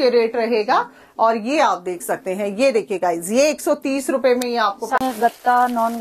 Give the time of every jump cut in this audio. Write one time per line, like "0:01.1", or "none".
0:05.0